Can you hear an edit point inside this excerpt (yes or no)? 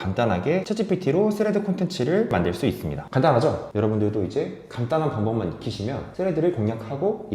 yes